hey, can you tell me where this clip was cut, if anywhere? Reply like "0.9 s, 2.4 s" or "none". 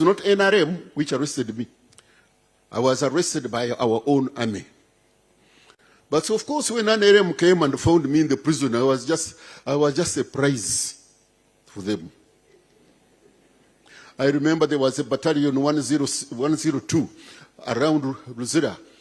none